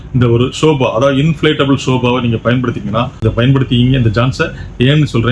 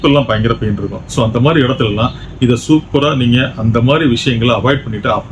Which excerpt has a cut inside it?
first; 1 cut; at 3.2 s

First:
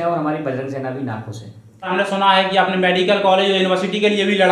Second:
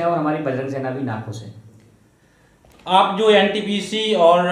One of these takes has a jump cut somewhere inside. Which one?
first; 1 cut; at 1.9 s

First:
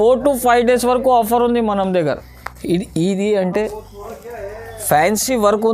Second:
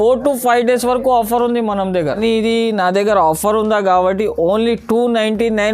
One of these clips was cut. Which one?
second; 1 cut; at 2.2 s

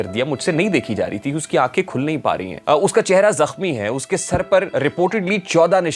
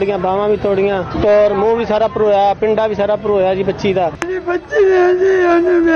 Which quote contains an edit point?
first; 2 cuts; at 2.5 s, 4.7 s

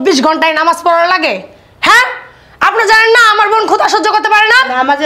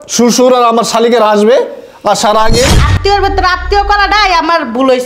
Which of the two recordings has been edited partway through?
second; 1 cut; at 2.7 s

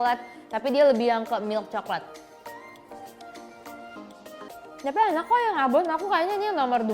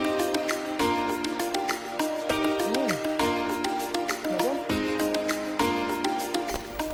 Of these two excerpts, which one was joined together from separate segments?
first; 1 cut; at 4.5 s

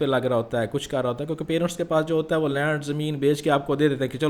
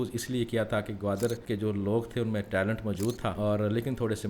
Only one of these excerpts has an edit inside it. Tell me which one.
second; 2 cuts; at 1.4 s, 3.4 s

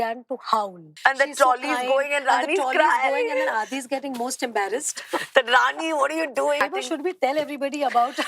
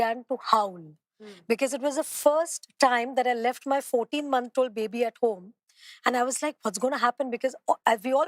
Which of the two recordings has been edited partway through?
first; 2 cuts; at 0.9 s, 6.6 s

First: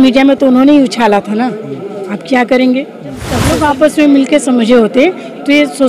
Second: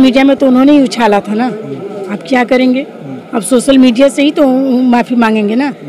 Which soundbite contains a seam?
first; 1 cut; at 3.4 s

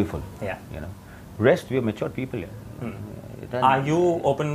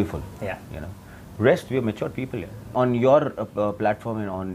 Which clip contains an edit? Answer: second; 1 cut; at 2.7 s

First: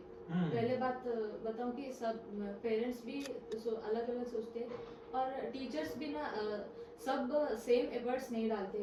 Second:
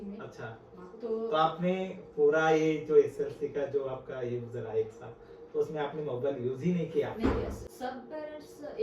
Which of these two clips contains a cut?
second; 1 cut; at 7.6 s

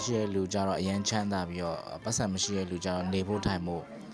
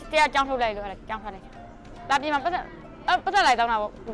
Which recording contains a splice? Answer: second; 1 cut; at 1.8 s

